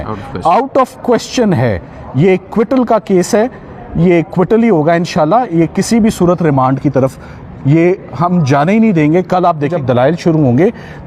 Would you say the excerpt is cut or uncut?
uncut